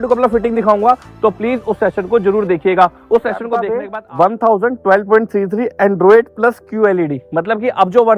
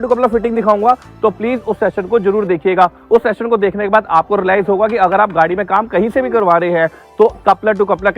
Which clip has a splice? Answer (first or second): first